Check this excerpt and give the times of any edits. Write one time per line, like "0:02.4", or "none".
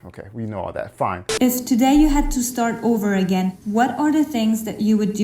0:01.2